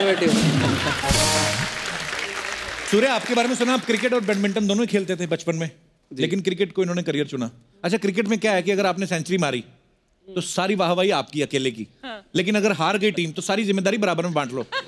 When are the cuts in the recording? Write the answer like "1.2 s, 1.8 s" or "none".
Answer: 2.8 s